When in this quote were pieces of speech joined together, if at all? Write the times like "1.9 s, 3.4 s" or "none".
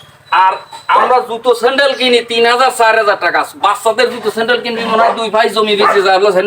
none